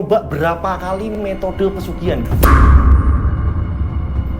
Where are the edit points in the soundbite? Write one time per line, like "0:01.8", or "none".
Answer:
0:01.1

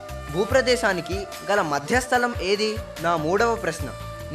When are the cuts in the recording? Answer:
0:02.9

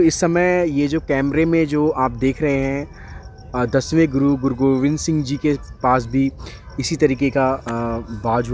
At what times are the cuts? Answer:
none

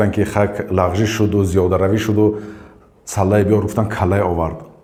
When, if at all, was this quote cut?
none

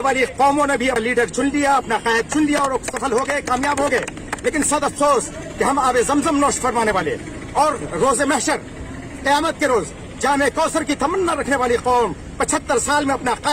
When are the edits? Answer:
0:01.0

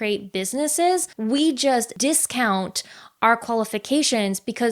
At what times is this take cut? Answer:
0:01.1
0:01.9

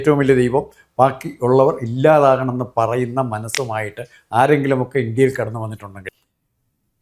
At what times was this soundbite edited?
0:06.1

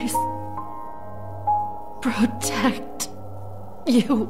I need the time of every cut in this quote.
none

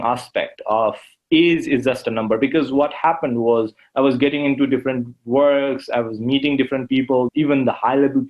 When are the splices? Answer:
0:07.3

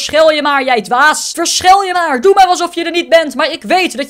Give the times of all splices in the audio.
none

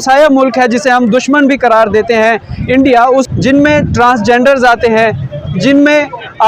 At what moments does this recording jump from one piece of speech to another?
0:03.3

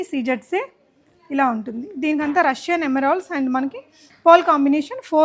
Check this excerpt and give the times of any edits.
none

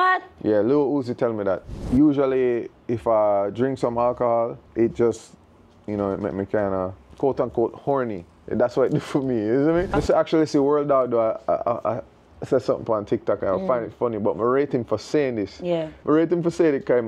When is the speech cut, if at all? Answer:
0:01.7
0:04.6
0:07.0
0:09.9
0:15.9

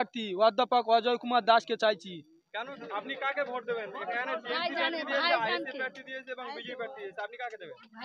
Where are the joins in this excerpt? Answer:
0:02.8

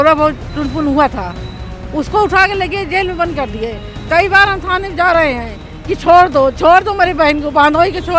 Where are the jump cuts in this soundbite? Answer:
none

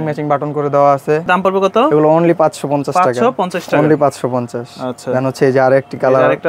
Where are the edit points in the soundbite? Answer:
none

